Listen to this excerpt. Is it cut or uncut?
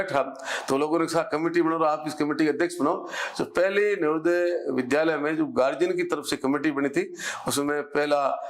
uncut